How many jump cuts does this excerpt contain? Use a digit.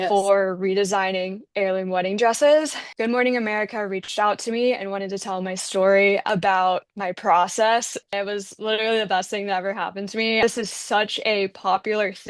4